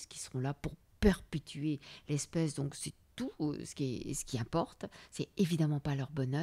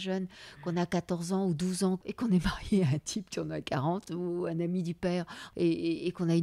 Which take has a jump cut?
second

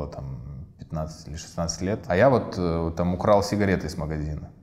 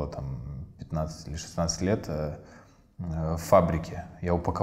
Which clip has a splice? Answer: first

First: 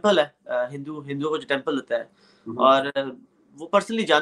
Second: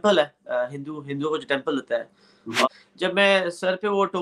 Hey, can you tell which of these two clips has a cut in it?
second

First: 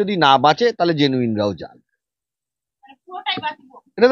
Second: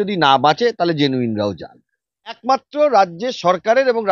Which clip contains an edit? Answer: second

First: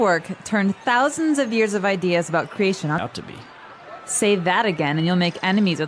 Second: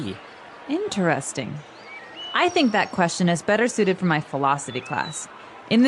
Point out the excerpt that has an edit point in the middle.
first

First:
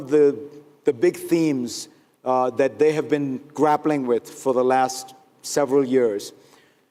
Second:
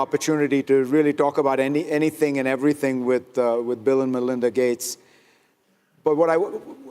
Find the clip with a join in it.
second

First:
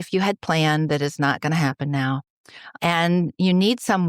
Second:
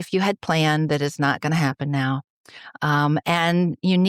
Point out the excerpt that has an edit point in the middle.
first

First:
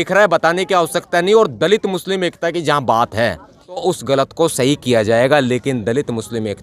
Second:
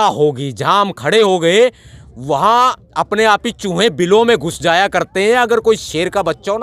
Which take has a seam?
first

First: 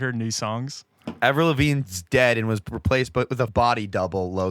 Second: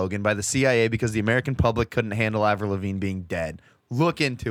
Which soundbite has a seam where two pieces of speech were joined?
first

